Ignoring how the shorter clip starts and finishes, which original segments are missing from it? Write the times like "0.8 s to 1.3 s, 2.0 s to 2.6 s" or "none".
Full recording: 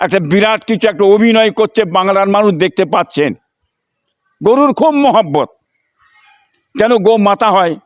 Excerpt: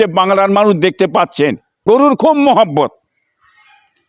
3.5 s to 4.2 s